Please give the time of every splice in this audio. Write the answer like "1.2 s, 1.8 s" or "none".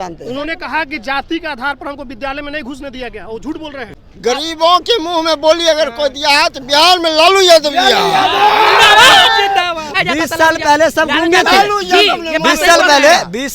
3.8 s, 9.8 s